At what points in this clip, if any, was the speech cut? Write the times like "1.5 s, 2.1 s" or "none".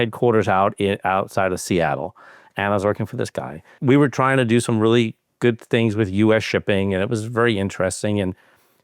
3.8 s